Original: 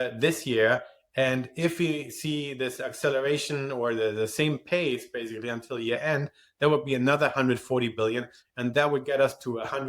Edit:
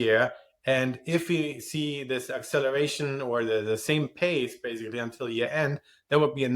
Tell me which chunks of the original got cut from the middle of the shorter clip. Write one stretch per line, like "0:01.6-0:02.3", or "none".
none